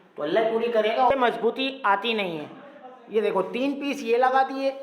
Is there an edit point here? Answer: yes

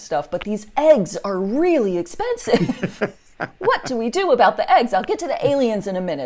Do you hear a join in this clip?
no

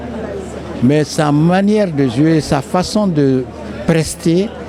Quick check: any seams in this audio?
no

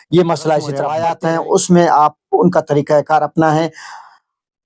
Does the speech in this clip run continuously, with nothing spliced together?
no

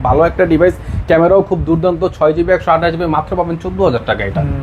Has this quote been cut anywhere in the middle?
no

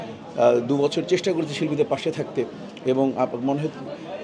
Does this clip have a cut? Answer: no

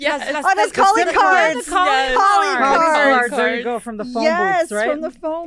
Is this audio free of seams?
yes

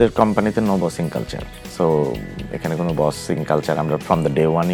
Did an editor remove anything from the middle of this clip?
no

